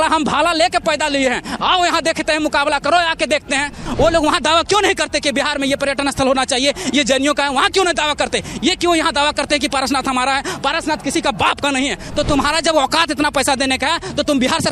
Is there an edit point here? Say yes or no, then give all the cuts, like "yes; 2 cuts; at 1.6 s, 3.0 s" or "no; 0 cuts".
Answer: yes; 2 cuts; at 3.8 s, 12.0 s